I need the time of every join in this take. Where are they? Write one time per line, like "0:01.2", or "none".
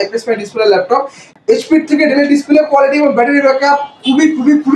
0:01.2